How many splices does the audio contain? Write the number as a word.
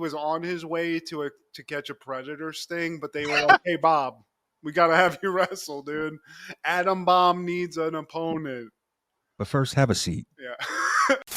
zero